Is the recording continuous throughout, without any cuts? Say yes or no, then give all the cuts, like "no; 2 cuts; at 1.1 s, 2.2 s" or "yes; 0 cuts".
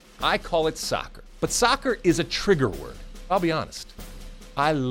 no; 2 cuts; at 1.2 s, 3.3 s